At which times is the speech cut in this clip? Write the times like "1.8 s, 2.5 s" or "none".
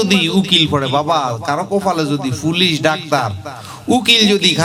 none